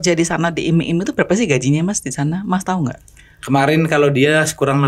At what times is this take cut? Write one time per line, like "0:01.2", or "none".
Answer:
none